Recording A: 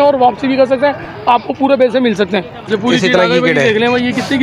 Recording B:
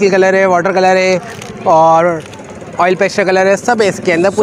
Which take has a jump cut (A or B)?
A